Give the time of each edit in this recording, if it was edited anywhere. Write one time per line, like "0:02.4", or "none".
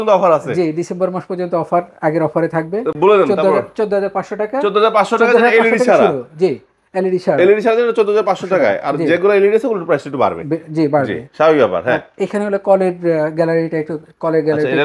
none